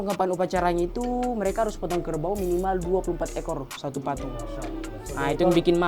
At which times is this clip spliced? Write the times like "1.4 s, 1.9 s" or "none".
none

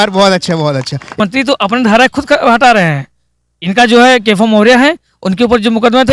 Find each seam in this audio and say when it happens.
1.1 s

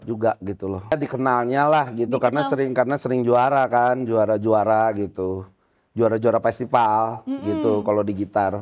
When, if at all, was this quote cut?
0.9 s

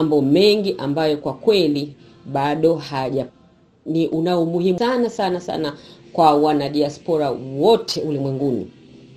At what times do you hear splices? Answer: 3.4 s, 4.8 s

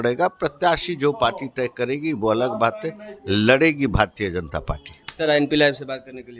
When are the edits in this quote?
none

